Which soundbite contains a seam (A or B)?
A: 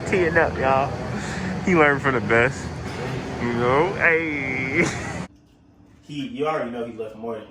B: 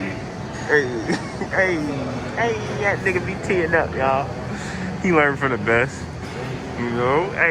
A